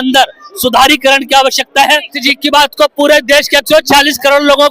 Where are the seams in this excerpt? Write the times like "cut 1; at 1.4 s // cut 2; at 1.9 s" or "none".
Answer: cut 1; at 2.1 s